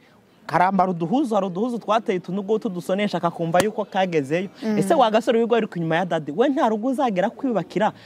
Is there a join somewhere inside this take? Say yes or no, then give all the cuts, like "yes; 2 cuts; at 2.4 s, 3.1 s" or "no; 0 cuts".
no; 0 cuts